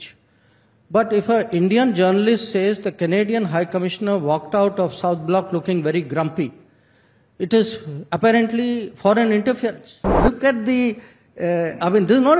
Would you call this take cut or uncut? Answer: cut